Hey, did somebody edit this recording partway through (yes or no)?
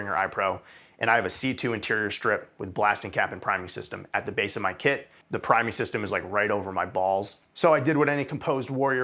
yes